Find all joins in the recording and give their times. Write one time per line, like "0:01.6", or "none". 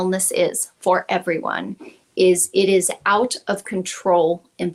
none